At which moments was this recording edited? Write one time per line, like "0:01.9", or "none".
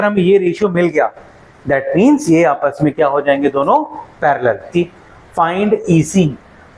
0:04.7